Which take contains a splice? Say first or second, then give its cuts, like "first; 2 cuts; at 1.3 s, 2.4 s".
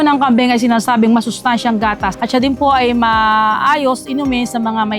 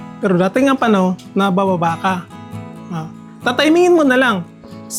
first; 1 cut; at 2.1 s